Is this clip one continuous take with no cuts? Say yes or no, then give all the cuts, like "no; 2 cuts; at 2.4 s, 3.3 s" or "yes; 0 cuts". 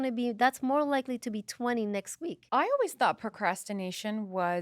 no; 1 cut; at 2.4 s